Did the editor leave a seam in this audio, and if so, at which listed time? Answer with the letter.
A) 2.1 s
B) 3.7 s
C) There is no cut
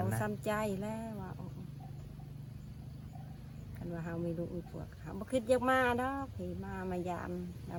C